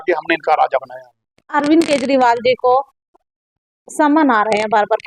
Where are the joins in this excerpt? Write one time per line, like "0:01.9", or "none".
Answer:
none